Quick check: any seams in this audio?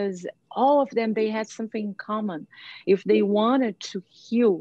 no; 0 cuts

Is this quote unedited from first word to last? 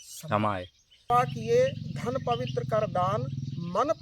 no; 1 cut; at 1.1 s

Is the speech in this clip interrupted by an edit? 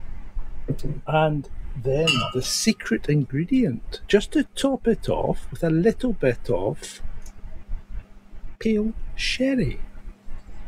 no; 0 cuts

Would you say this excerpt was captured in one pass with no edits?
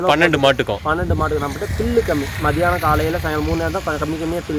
yes; 0 cuts

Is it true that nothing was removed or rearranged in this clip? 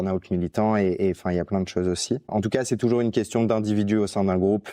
yes; 0 cuts

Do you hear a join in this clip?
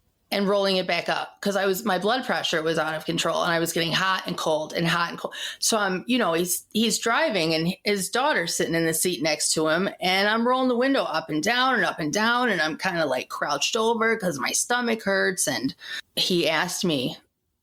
no; 0 cuts

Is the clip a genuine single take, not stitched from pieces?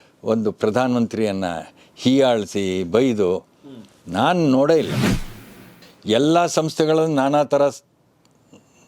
no; 1 cut; at 5.5 s

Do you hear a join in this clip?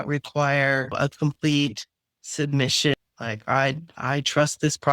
yes; 2 cuts; at 0.9 s, 3.4 s

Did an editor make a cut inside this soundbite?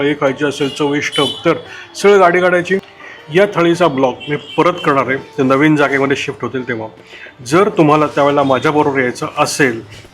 yes; 1 cut; at 2.9 s

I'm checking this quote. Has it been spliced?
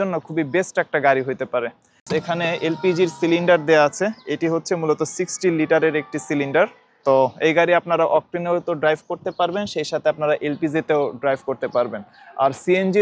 yes; 2 cuts; at 2.0 s, 6.9 s

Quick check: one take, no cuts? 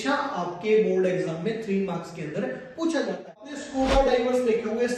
no; 1 cut; at 3.6 s

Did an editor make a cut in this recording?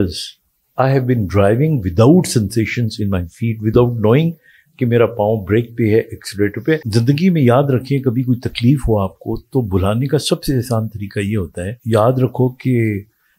yes; 2 cuts; at 6.9 s, 11.7 s

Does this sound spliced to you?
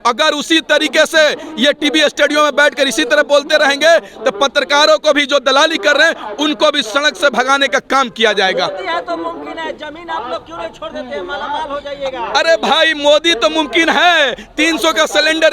no; 0 cuts

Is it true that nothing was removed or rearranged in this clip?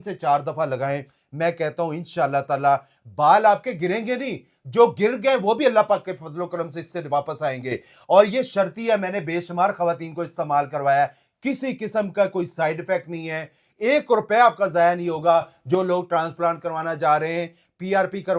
yes; 0 cuts

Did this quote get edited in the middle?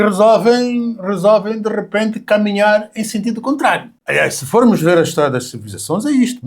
yes; 1 cut; at 3.9 s

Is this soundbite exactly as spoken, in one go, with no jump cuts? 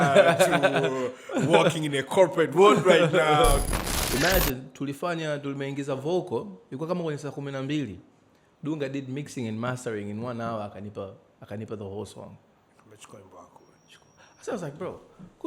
no; 1 cut; at 3.7 s

